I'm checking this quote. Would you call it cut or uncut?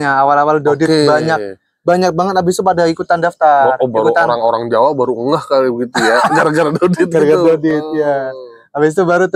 uncut